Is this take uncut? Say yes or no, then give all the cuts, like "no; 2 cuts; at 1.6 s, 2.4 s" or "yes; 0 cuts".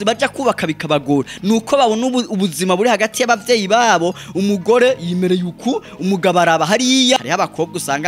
no; 1 cut; at 7.2 s